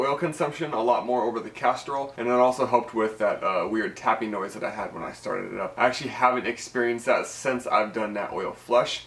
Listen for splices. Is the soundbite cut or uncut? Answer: cut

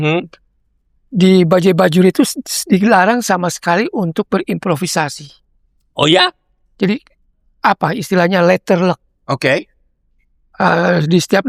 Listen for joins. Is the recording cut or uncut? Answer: uncut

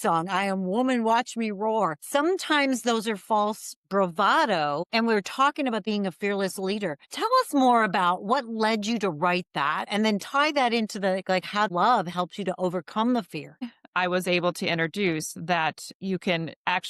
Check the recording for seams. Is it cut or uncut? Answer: cut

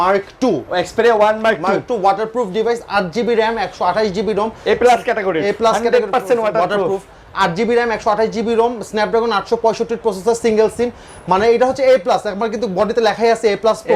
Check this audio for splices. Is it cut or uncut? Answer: uncut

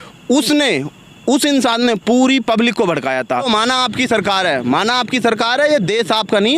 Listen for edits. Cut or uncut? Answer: cut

